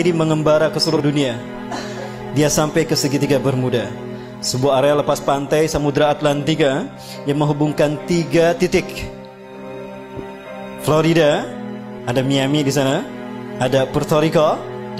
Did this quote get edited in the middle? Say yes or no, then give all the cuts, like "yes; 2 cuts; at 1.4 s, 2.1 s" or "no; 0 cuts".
yes; 1 cut; at 1.0 s